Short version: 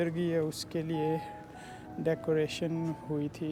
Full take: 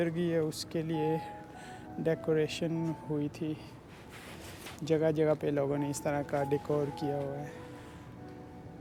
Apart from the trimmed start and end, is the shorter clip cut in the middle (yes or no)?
no